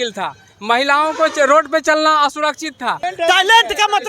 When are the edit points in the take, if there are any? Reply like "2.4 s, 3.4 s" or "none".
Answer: 3.1 s

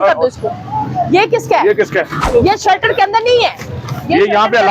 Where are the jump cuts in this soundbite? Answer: 2.3 s

